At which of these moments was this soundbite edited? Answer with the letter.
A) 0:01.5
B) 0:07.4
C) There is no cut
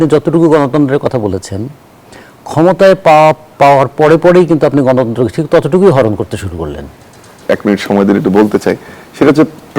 B